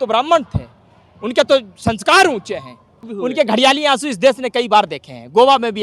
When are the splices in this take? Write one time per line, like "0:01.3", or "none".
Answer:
0:03.1